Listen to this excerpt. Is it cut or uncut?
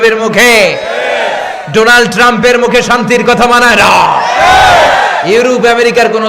uncut